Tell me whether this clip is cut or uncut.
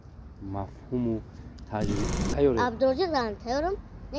cut